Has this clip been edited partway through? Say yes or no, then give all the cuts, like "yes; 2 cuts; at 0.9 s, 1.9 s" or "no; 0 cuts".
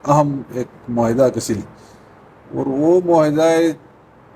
no; 0 cuts